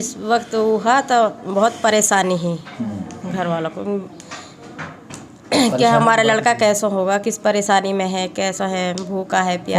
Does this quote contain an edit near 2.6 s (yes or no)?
no